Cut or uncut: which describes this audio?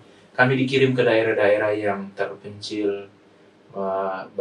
uncut